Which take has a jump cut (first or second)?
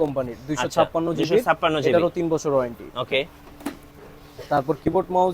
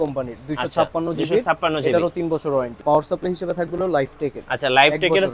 second